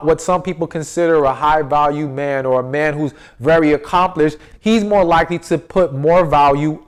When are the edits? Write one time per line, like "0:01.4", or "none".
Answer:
none